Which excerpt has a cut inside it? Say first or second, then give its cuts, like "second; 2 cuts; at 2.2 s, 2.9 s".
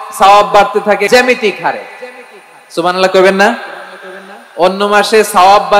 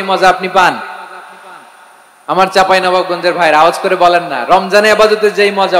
first; 1 cut; at 1.1 s